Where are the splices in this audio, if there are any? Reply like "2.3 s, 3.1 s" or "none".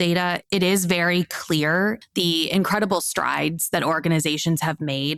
none